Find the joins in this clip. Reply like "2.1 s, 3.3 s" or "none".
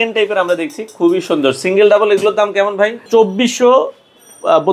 3.1 s

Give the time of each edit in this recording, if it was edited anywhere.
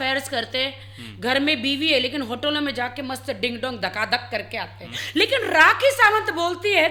none

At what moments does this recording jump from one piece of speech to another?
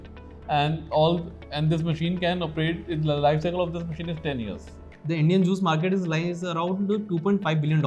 4.9 s

